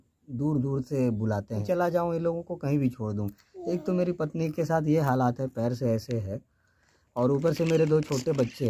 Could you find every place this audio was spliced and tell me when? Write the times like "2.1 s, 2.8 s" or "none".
1.6 s